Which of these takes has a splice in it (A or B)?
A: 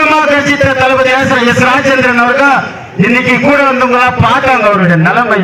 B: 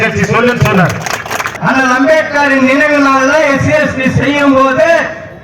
B